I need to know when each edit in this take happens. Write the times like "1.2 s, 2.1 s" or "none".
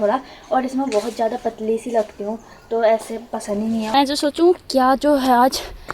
3.9 s